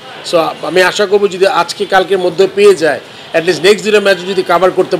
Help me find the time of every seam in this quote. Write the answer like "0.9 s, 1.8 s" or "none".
none